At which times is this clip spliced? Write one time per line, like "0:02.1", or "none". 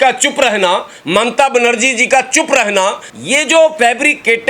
0:03.1